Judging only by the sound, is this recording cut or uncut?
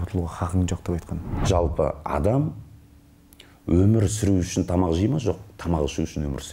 cut